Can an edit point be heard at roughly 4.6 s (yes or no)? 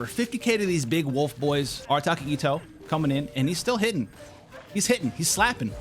no